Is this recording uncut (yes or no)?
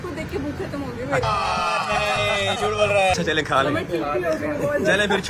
yes